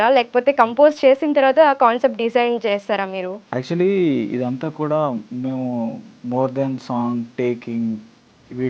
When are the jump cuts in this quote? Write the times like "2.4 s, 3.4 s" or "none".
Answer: 3.4 s, 6.1 s